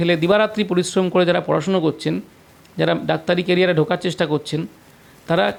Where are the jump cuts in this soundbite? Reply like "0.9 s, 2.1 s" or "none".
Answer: none